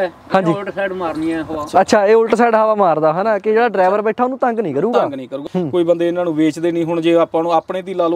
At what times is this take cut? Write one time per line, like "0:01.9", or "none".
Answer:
0:05.4